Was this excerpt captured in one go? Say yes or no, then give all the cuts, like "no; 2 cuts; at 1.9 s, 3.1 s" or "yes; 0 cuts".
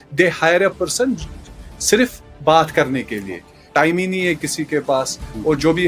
no; 1 cut; at 3.6 s